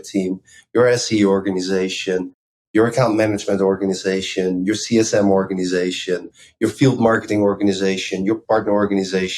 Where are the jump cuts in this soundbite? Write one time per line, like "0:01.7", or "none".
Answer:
0:06.4
0:08.4